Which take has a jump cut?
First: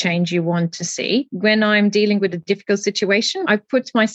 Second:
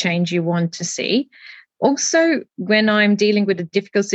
first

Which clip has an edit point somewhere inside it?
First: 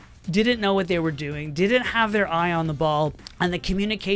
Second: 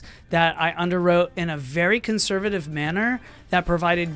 first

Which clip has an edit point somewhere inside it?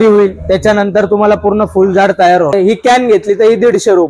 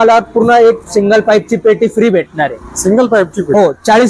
first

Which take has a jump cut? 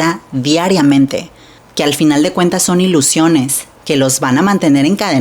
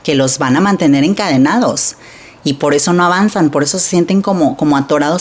first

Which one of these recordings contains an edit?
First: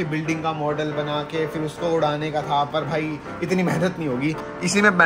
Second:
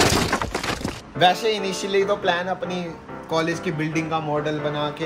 second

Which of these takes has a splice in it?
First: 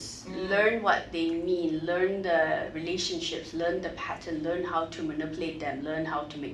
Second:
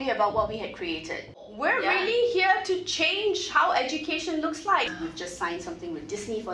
second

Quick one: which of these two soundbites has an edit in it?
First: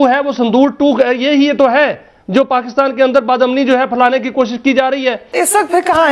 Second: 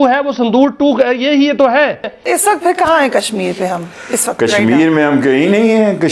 second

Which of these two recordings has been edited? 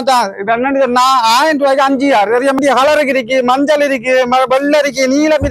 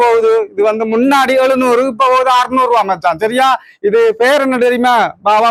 first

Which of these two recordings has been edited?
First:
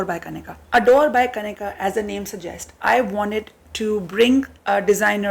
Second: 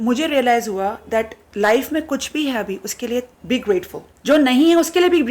second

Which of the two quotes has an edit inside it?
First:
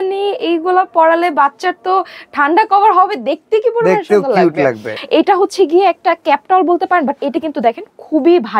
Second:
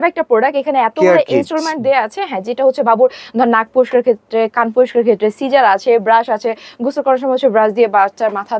first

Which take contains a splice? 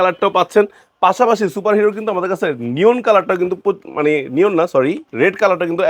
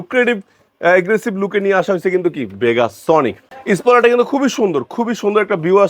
second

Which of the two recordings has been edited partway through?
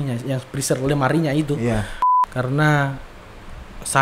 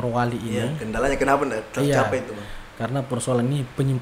first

